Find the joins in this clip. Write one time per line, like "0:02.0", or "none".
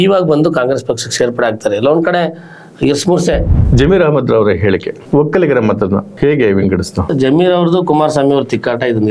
0:03.6
0:07.1